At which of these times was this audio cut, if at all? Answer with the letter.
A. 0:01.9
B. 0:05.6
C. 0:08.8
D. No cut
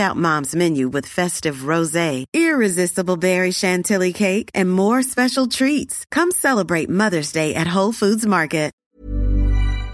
C